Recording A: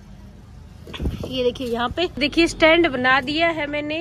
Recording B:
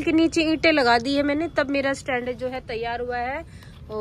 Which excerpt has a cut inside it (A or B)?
A